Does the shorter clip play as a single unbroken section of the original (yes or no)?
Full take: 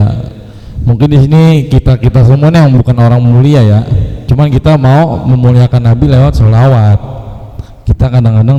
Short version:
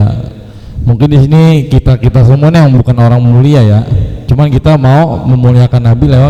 yes